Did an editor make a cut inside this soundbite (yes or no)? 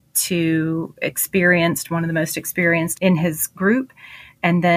yes